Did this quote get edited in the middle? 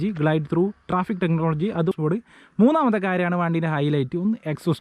yes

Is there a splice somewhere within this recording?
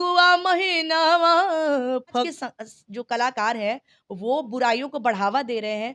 yes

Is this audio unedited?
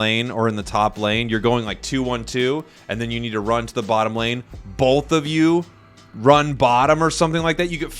yes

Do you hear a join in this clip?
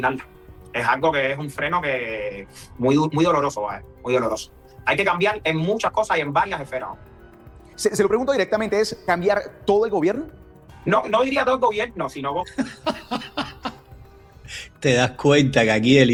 no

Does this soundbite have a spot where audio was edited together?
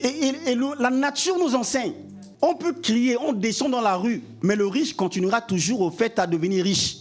yes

